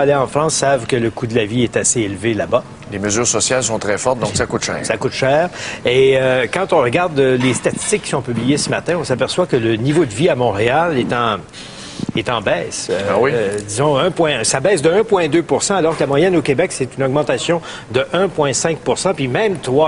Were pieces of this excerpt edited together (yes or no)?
no